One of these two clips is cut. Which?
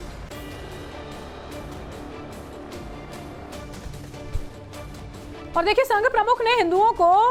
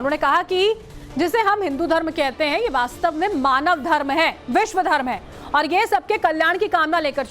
second; 1 cut; at 3.2 s

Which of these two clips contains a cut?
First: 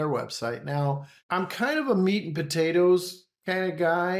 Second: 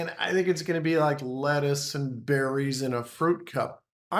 first; 1 cut; at 1.1 s

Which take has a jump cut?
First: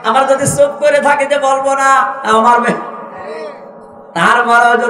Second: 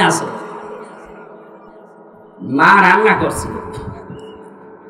second; 1 cut; at 2.3 s

